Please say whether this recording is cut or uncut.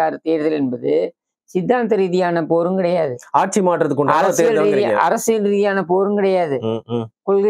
uncut